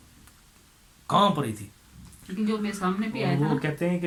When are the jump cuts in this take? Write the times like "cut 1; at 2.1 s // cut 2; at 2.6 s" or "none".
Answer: none